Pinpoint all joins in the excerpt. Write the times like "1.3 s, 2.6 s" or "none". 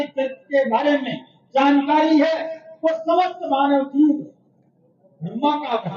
none